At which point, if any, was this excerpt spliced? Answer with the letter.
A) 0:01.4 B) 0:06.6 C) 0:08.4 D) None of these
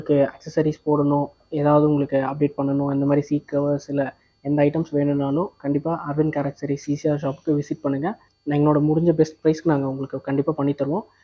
A